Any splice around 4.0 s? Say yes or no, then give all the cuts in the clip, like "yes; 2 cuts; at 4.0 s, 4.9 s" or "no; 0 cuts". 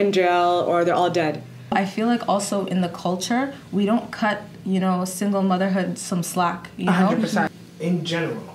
no; 2 cuts; at 1.7 s, 7.5 s